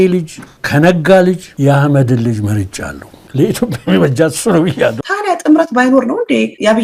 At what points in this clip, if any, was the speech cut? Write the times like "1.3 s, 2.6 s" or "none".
1.5 s, 5.0 s